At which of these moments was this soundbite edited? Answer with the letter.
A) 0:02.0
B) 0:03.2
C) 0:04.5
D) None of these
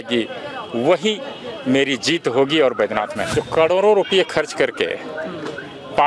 B